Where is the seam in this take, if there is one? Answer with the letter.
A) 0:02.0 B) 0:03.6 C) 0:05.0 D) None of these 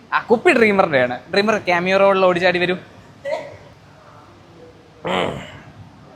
B